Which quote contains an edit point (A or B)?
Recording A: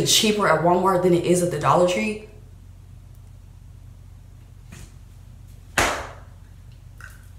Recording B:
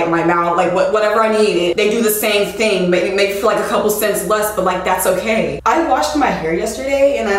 B